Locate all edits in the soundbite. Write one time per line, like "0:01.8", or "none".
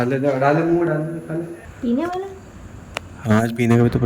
0:01.6